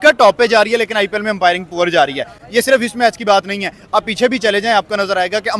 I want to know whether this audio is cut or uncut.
uncut